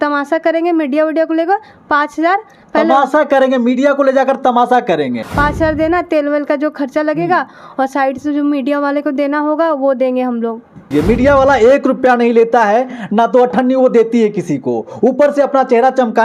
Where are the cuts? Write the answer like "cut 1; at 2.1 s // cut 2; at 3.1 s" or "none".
cut 1; at 5.2 s // cut 2; at 10.9 s